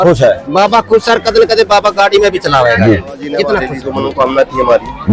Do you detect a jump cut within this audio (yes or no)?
yes